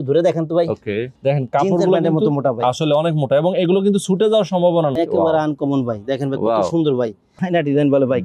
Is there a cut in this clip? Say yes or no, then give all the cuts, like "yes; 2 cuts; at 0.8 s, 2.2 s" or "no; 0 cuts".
yes; 3 cuts; at 1.1 s, 4.9 s, 7.3 s